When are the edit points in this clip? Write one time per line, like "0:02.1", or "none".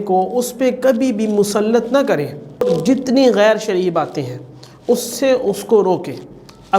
0:02.6